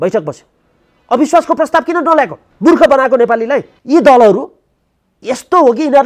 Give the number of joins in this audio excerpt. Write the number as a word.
two